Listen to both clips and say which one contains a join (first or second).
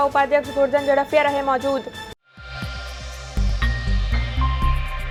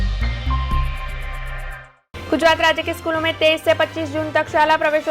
second